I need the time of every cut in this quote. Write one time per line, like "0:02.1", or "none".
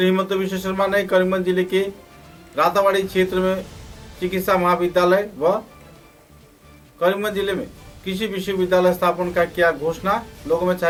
none